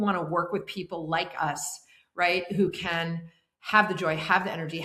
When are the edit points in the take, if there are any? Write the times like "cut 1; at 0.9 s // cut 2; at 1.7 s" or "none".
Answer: none